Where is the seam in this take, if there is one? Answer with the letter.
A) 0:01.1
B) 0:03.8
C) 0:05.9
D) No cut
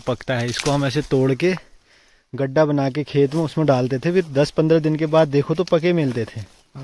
D